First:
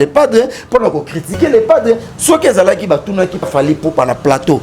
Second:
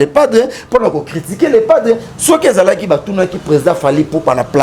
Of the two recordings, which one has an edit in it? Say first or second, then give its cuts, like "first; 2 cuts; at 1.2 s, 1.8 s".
first; 1 cut; at 3.5 s